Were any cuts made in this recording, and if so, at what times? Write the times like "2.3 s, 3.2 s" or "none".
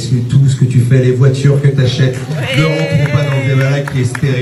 none